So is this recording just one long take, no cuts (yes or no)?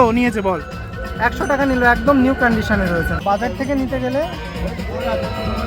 no